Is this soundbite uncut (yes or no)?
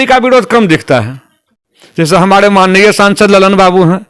no